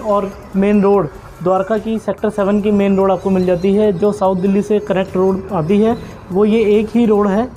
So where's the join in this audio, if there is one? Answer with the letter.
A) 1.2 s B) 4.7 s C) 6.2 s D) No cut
D